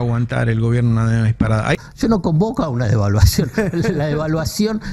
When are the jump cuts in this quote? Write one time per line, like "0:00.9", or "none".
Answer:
0:01.9